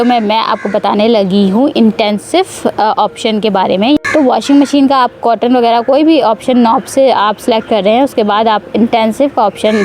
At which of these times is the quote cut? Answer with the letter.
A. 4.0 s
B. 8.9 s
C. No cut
A